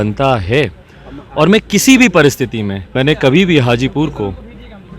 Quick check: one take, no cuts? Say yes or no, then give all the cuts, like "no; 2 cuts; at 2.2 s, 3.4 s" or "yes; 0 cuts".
no; 1 cut; at 2.9 s